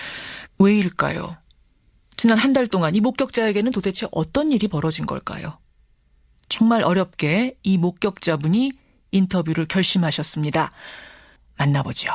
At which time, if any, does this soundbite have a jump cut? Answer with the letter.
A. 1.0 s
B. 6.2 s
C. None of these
A